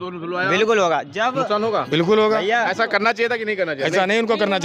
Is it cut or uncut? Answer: uncut